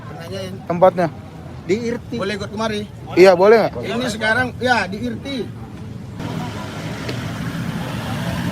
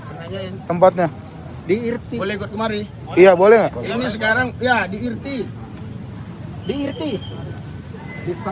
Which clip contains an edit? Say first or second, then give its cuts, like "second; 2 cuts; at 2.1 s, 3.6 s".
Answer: first; 1 cut; at 6.2 s